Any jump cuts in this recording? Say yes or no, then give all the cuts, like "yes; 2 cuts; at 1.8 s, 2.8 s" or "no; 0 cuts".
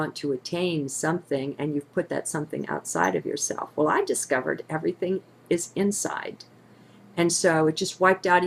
no; 0 cuts